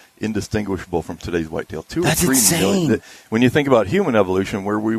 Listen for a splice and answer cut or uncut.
uncut